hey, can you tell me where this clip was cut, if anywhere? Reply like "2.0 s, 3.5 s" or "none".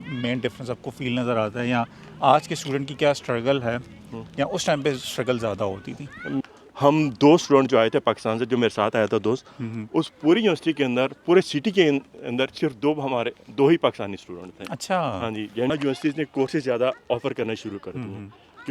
6.4 s, 15.7 s